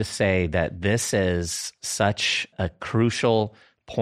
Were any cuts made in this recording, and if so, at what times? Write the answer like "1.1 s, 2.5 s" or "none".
2.5 s